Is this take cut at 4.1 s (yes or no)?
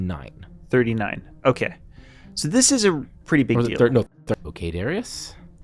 yes